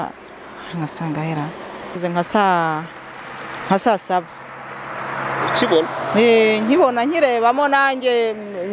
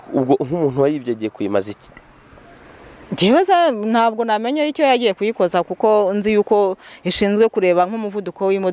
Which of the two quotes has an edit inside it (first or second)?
first